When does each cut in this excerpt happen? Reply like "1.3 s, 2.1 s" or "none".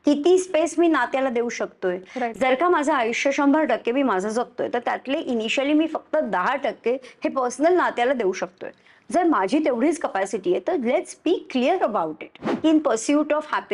2.3 s, 12.6 s